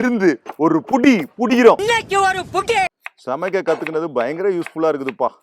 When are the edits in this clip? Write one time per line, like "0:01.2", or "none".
0:01.8
0:03.0